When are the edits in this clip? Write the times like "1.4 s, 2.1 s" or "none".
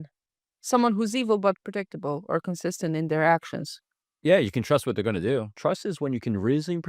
5.5 s